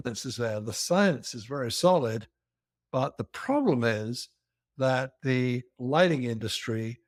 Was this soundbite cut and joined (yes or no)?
no